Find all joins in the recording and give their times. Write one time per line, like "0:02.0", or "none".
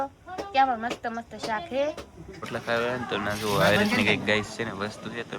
0:02.5